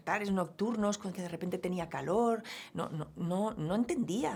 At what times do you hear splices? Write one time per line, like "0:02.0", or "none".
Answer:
none